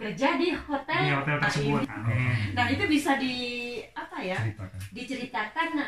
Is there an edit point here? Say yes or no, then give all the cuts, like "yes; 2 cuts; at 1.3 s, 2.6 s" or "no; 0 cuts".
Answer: yes; 1 cut; at 1.8 s